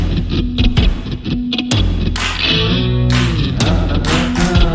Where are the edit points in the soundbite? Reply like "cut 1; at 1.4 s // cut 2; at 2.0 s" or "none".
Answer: none